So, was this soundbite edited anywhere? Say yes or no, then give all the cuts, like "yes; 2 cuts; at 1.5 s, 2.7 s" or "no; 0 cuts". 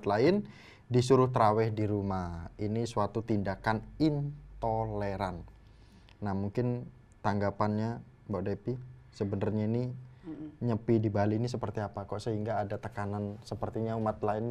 no; 0 cuts